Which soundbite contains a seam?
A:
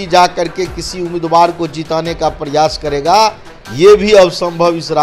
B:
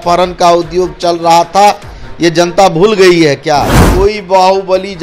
B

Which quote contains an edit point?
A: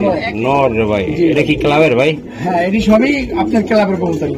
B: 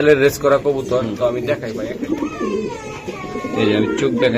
B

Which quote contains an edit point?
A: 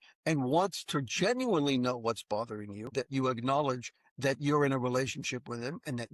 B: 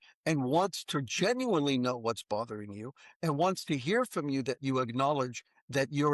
A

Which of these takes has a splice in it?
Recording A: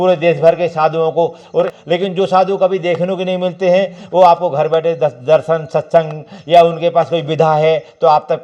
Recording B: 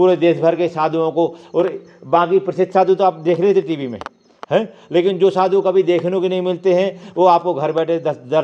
A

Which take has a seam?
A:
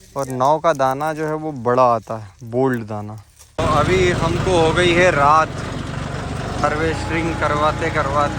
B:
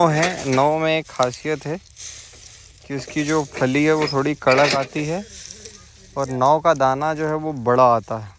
A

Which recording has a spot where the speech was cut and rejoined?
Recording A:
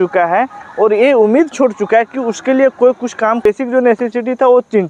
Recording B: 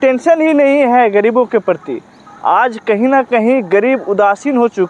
A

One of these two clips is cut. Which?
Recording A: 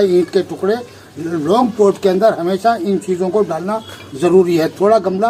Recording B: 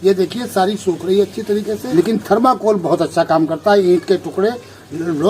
B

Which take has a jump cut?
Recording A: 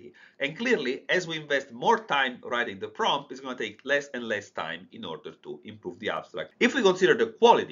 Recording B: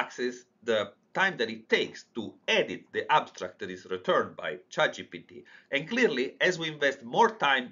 A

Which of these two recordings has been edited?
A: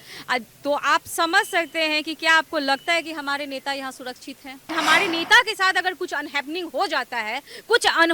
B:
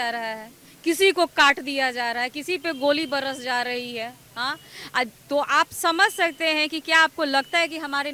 A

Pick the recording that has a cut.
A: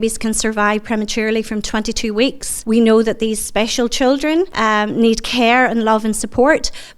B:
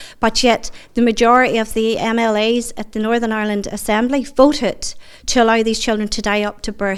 A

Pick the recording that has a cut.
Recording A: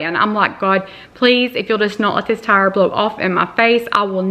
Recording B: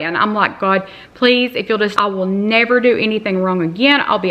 B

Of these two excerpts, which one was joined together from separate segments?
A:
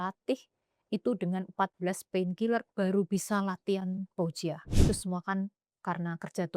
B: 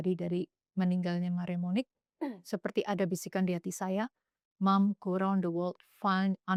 A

